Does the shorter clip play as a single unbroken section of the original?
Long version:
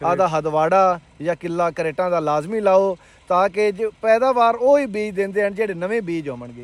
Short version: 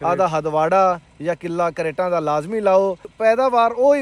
no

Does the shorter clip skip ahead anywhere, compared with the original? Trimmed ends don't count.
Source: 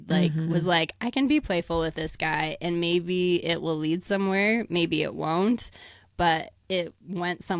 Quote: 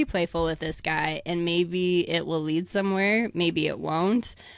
no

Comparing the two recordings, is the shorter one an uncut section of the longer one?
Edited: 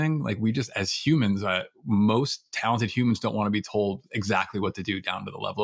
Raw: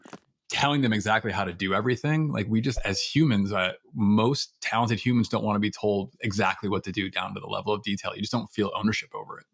yes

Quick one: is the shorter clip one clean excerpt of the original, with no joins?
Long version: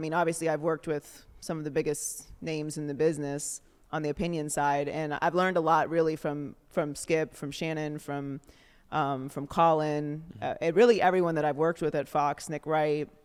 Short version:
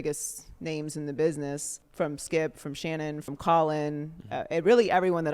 no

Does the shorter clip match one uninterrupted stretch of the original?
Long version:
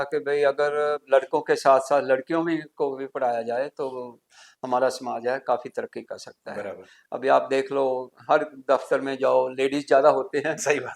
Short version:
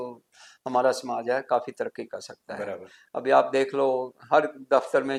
yes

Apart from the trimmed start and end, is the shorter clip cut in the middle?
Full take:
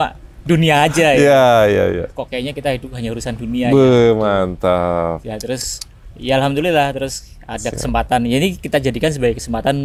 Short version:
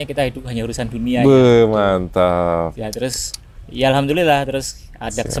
no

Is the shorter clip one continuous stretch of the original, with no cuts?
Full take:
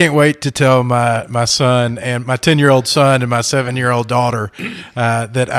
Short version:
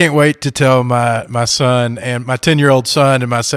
yes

